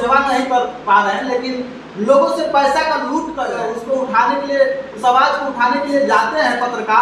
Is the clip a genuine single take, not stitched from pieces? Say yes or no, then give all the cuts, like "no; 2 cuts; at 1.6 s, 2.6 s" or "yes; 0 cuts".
no; 1 cut; at 3.4 s